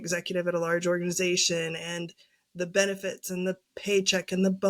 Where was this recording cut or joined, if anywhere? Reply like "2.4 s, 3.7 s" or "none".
none